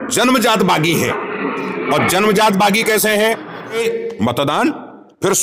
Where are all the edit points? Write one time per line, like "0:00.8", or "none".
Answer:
0:03.8